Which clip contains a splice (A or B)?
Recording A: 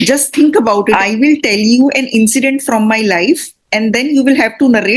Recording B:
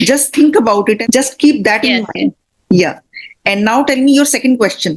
A